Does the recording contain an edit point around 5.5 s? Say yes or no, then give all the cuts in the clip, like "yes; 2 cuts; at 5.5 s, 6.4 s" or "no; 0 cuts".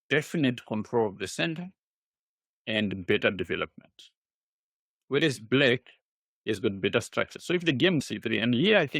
no; 1 cut; at 8.0 s